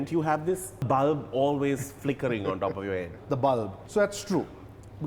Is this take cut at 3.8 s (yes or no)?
yes